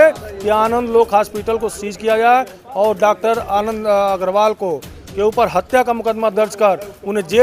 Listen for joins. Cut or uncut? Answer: uncut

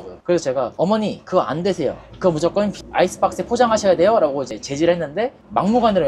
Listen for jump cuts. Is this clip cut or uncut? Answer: uncut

